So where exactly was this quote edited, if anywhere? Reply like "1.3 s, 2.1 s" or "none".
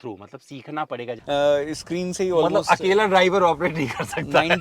1.1 s